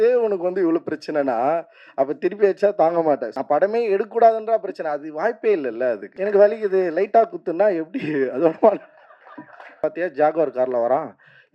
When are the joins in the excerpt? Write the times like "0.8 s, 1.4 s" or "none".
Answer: 3.3 s, 6.1 s, 9.7 s